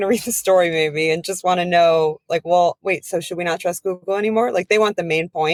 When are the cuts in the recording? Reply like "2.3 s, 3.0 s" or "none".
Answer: none